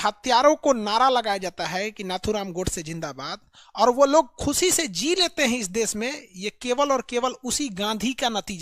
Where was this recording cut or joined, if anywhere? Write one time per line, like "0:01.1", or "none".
none